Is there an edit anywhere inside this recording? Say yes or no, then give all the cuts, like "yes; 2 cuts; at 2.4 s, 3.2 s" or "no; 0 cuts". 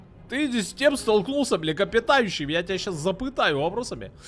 no; 0 cuts